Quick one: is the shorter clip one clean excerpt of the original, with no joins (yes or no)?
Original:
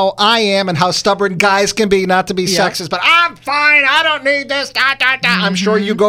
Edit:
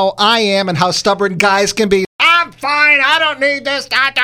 no